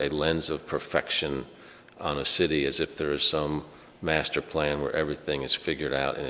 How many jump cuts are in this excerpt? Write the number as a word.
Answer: zero